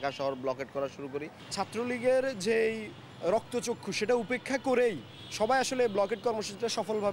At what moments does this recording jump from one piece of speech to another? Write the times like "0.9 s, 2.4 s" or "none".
1.4 s